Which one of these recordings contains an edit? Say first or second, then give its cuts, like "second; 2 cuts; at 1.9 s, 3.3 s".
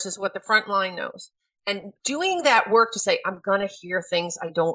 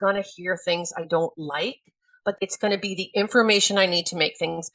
second; 1 cut; at 2.4 s